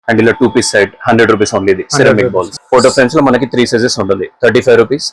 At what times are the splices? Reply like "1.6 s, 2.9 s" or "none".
2.5 s